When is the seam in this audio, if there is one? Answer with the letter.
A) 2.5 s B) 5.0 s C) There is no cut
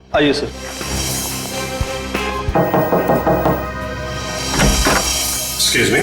A